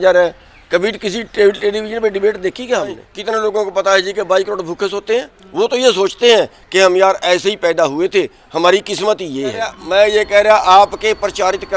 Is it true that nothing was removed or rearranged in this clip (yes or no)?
no